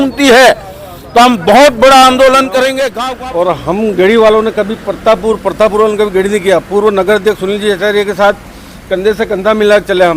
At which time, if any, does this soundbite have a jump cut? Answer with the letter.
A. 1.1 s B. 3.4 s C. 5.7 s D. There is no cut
B